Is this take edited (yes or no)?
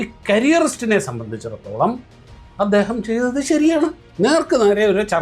yes